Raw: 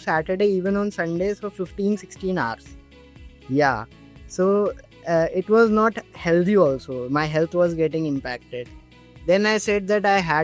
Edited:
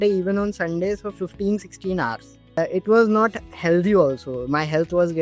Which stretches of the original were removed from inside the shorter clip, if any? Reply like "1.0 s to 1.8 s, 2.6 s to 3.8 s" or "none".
3.0 s to 5.2 s